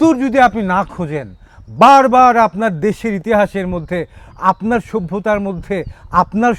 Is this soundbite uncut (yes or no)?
yes